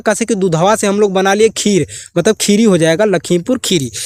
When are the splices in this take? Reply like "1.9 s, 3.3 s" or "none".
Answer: none